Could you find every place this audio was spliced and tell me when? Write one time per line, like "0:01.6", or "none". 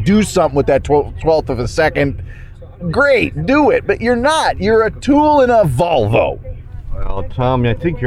none